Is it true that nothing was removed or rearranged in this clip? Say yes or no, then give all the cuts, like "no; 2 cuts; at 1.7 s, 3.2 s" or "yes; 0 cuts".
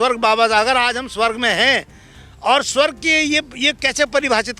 yes; 0 cuts